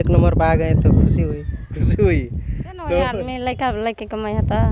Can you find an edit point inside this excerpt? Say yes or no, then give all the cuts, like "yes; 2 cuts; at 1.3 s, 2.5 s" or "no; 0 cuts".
yes; 1 cut; at 3.2 s